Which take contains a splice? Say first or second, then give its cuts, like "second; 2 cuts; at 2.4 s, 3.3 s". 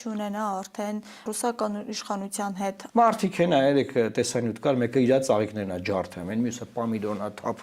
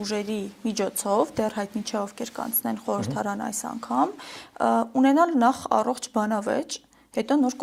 first; 2 cuts; at 1.3 s, 2.8 s